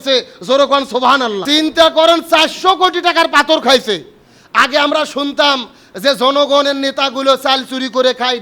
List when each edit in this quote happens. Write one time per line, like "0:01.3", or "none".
0:01.4